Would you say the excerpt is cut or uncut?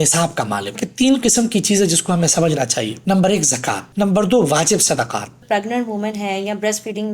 cut